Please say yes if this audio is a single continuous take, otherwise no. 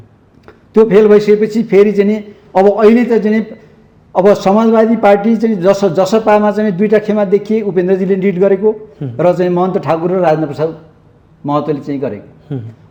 yes